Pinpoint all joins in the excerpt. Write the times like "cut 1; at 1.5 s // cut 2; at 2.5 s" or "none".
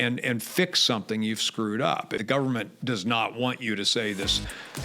cut 1; at 2.2 s